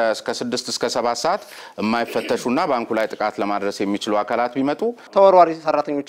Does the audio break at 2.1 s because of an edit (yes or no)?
no